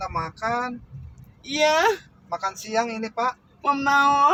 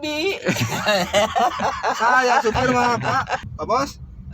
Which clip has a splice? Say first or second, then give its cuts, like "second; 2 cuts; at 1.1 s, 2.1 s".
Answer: second; 2 cuts; at 1.8 s, 3.5 s